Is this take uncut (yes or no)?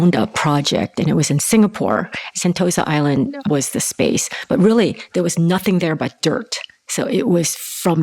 no